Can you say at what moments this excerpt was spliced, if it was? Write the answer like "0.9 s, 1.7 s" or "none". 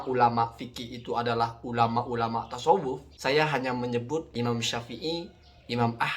3.1 s, 4.3 s

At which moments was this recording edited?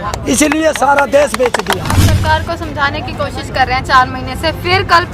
2.1 s

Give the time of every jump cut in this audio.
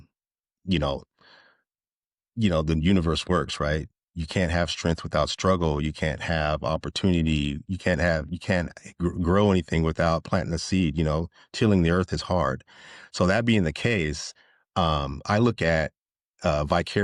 none

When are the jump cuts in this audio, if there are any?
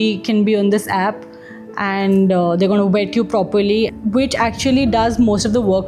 none

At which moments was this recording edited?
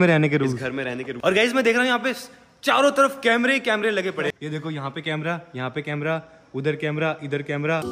1.1 s, 4.4 s

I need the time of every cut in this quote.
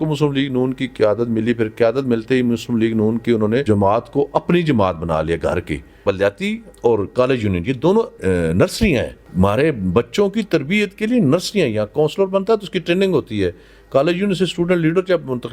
3.6 s, 6.3 s, 8.2 s, 9.2 s

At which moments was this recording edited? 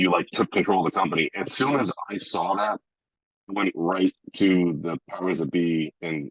none

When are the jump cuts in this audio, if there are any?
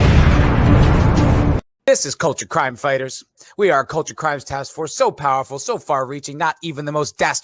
1.6 s

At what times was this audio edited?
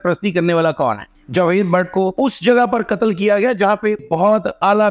1.2 s, 4.0 s

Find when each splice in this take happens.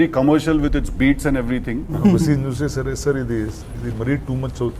1.9 s

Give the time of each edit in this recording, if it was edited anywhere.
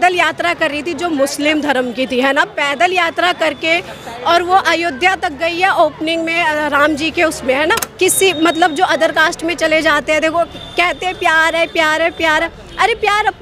7.9 s

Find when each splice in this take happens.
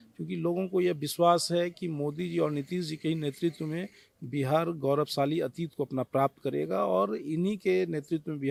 none

